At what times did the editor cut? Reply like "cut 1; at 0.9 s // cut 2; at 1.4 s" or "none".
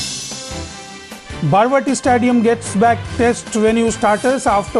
cut 1; at 1.0 s

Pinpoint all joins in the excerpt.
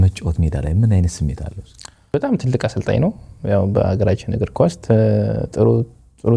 cut 1; at 2.1 s

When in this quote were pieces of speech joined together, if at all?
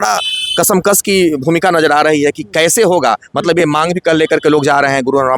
none

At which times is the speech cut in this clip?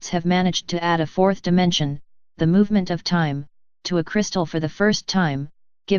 cut 1; at 3.9 s

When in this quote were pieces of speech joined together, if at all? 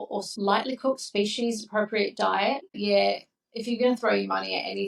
cut 1; at 2.7 s

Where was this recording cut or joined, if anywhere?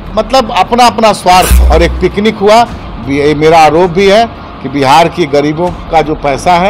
cut 1; at 1.6 s

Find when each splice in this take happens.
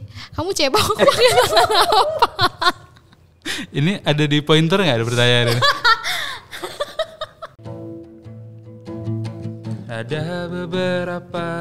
cut 1; at 7.6 s

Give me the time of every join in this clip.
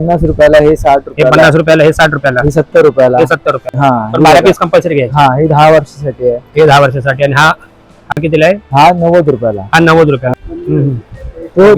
none

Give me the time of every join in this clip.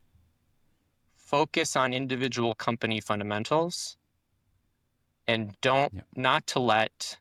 none

